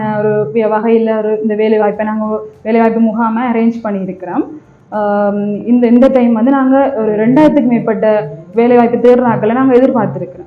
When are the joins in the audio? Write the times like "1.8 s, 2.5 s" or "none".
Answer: none